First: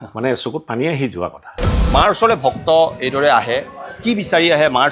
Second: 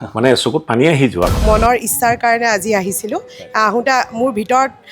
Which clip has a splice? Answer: second; 1 cut; at 1.4 s

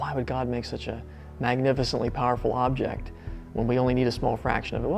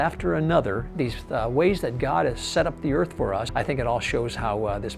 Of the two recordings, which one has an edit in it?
second; 2 cuts; at 0.9 s, 3.5 s

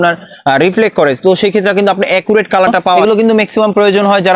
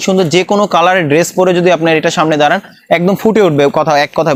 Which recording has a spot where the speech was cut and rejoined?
first; 1 cut; at 3.0 s

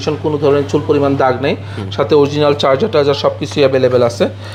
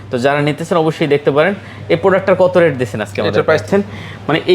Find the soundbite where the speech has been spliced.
second; 1 cut; at 3.6 s

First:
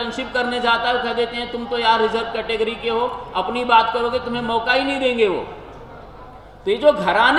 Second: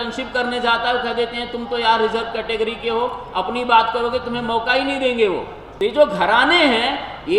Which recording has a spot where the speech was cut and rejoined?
second; 1 cut; at 5.6 s

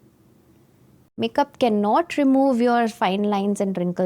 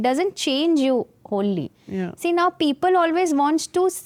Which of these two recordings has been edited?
first; 1 cut; at 1.0 s

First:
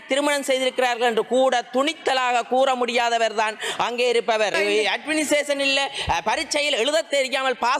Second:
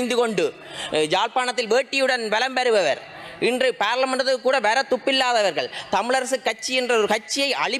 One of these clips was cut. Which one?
first; 1 cut; at 4.5 s

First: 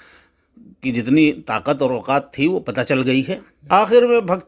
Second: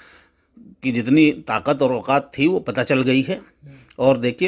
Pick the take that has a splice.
first; 1 cut; at 3.5 s

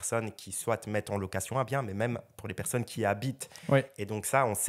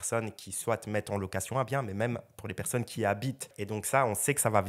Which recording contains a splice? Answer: second; 1 cut; at 3.6 s

